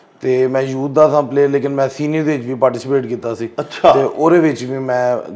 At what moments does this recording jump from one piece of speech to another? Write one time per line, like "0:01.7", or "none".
none